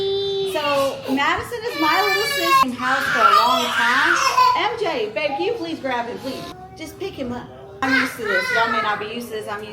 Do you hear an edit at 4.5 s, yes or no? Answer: no